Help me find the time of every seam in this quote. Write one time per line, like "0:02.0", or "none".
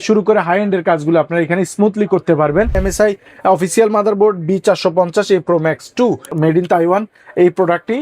0:02.8
0:06.3